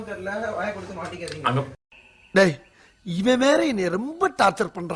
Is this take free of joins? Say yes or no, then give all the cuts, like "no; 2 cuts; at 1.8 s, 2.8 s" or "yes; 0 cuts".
yes; 0 cuts